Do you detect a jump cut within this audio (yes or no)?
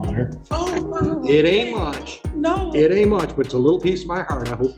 no